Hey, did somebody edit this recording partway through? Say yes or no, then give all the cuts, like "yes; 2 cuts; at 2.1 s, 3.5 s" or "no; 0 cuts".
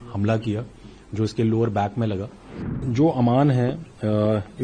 yes; 1 cut; at 2.8 s